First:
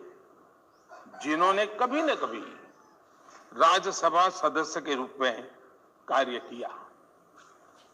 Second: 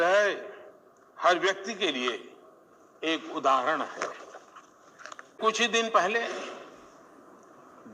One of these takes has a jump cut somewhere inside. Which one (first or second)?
second